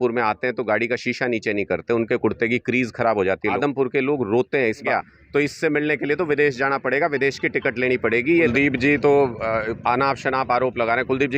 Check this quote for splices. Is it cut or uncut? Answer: cut